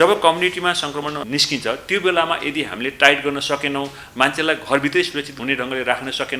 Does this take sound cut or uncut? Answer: cut